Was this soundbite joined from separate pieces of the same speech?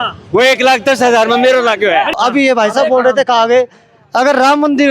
yes; 1 cut; at 2.2 s

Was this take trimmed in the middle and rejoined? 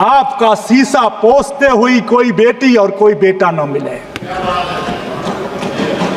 no; 0 cuts

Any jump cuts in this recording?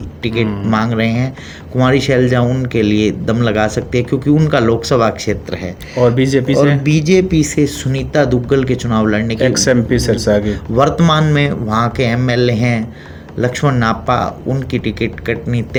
no; 0 cuts

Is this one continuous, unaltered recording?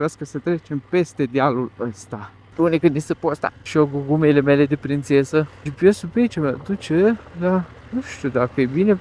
no; 4 cuts; at 2.4 s, 3.6 s, 5.6 s, 7.8 s

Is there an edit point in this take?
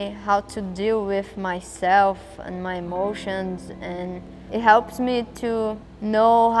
no; 0 cuts

